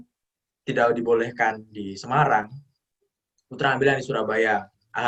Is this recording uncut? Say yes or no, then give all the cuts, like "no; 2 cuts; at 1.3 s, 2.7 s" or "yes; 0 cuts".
yes; 0 cuts